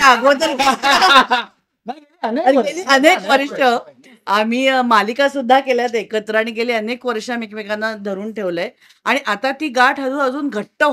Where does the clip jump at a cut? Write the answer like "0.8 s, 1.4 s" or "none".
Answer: none